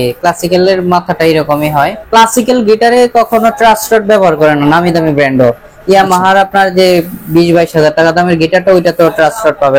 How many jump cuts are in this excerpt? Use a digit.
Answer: 1